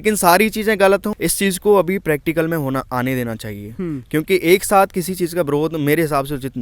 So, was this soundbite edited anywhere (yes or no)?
yes